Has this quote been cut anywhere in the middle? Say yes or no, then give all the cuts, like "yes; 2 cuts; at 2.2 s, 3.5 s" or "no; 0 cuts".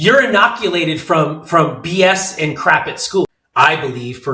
yes; 1 cut; at 3.4 s